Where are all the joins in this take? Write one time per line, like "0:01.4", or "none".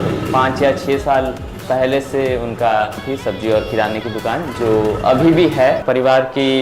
0:03.0
0:05.8

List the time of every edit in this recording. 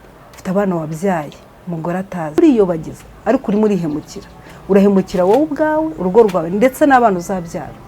0:02.4

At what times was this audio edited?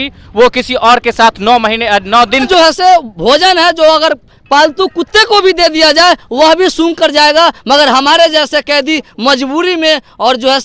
0:02.5

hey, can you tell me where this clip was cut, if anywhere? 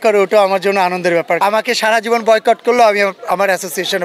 0:01.4

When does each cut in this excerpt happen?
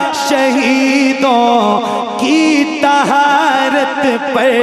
none

